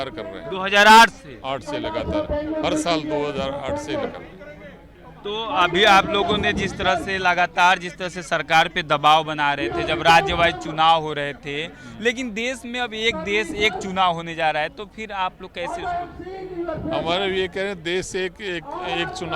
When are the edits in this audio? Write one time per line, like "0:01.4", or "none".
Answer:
none